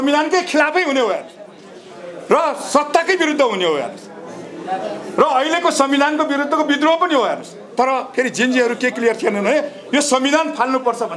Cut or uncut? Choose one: uncut